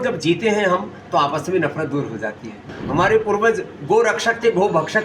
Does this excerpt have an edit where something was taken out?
yes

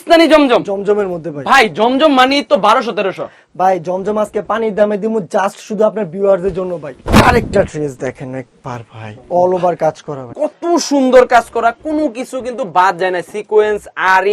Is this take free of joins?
no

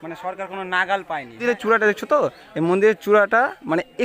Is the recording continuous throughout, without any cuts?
no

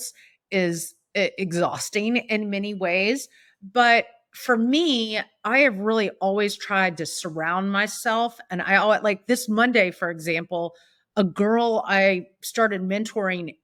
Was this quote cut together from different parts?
no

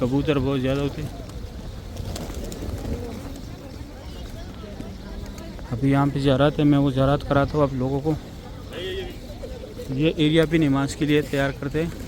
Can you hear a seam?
no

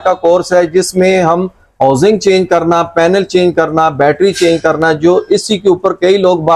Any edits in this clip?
no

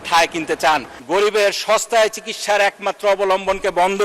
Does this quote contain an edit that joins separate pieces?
yes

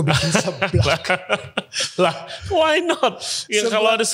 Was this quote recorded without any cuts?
yes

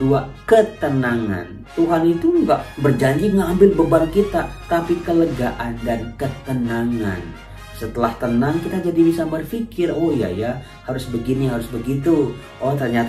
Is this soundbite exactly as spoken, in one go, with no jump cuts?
no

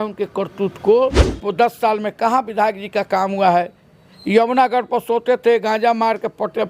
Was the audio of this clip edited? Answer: yes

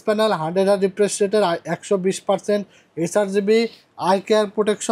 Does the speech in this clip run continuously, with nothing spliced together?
yes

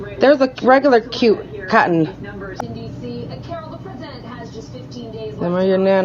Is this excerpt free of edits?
no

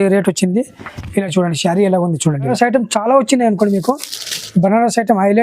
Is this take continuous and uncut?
no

